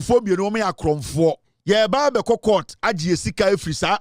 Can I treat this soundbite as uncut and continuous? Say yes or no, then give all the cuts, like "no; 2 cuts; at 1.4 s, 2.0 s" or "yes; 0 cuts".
no; 1 cut; at 1.5 s